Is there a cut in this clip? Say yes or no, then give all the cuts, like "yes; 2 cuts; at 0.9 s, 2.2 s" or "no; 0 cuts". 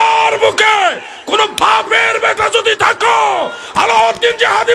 no; 0 cuts